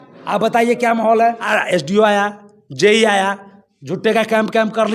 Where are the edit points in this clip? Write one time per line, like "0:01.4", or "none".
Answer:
0:01.5